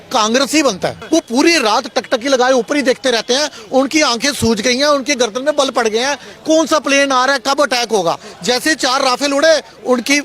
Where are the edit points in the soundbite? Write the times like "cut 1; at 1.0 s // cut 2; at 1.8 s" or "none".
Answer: cut 1; at 1.0 s